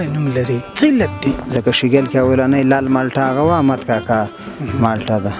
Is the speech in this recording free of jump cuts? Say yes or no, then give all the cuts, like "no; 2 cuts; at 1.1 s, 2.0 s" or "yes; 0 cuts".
no; 1 cut; at 1.4 s